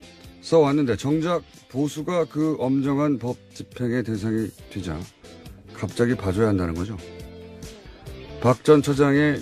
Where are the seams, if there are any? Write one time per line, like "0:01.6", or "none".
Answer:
0:05.7